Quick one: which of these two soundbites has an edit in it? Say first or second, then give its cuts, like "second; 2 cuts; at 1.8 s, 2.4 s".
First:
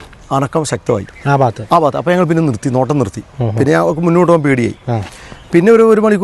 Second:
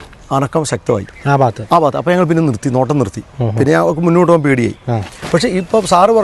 second; 1 cut; at 5.2 s